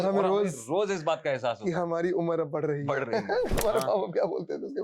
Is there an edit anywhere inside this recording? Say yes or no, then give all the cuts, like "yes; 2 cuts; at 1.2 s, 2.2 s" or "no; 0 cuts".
yes; 1 cut; at 3.6 s